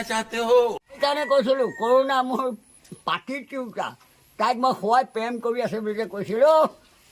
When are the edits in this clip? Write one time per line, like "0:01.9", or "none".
0:01.0